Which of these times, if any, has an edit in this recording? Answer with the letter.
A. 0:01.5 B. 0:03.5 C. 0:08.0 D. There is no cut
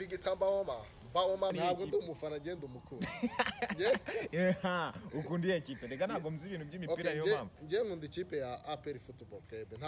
A